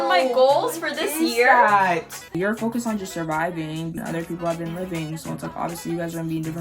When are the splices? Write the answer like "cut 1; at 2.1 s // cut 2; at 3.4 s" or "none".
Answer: cut 1; at 2.3 s // cut 2; at 4.0 s